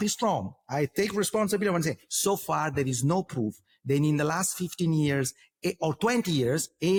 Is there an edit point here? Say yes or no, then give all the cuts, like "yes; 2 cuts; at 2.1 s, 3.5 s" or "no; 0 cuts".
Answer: no; 0 cuts